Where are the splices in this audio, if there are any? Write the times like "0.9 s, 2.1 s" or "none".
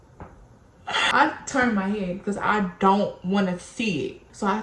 none